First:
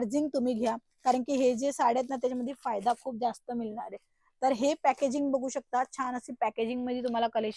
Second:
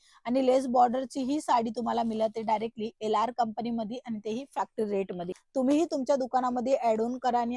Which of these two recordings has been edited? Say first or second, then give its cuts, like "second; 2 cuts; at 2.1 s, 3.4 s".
second; 1 cut; at 5.4 s